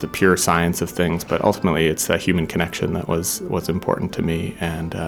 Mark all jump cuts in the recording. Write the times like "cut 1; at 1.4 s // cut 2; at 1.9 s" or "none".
none